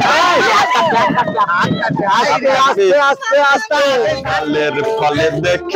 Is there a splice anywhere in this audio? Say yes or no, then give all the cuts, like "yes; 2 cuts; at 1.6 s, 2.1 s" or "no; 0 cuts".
yes; 1 cut; at 4.2 s